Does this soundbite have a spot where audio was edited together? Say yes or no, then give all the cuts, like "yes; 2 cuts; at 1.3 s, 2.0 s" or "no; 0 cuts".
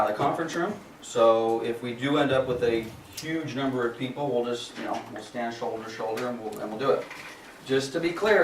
yes; 1 cut; at 3.5 s